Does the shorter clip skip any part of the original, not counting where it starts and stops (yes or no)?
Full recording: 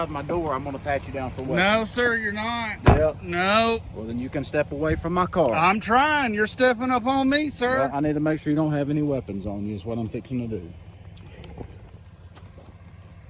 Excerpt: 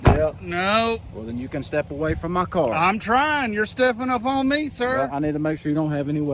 no